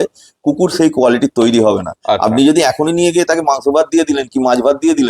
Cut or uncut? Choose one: uncut